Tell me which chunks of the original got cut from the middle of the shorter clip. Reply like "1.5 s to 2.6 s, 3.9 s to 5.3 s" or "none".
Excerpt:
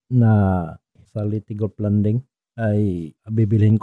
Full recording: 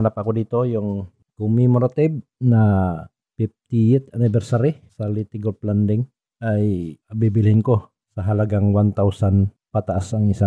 3.3 s to 4.8 s